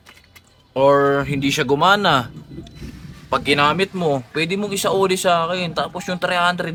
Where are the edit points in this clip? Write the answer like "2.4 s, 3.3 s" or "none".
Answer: none